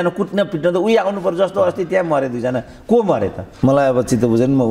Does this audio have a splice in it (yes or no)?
yes